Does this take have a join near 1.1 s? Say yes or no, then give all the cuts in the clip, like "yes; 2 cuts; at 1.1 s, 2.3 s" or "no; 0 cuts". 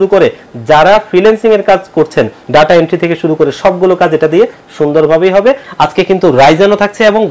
no; 2 cuts; at 2.4 s, 5.7 s